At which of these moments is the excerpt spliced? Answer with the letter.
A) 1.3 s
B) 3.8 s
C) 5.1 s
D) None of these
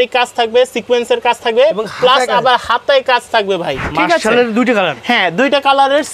B